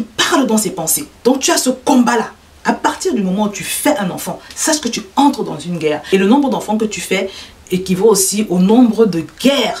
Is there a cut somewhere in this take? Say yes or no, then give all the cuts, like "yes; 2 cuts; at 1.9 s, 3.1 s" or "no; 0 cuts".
yes; 1 cut; at 1.1 s